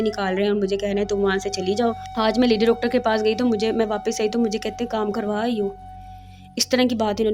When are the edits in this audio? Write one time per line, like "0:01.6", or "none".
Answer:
0:02.0